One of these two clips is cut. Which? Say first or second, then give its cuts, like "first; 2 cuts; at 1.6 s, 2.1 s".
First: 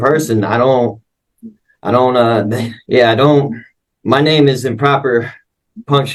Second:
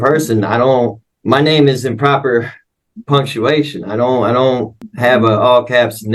second; 2 cuts; at 1.1 s, 4.8 s